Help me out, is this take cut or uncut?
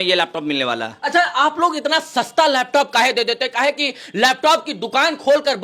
uncut